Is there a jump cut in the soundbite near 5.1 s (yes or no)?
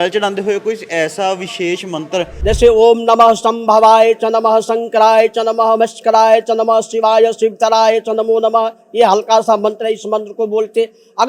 no